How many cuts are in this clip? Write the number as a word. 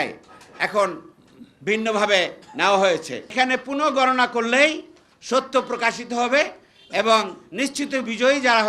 one